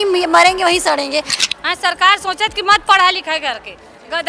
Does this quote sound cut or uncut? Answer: cut